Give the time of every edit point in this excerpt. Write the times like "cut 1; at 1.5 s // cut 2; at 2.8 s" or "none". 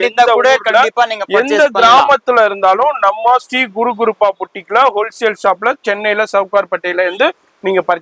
none